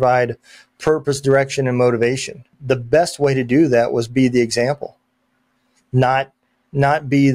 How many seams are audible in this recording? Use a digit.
1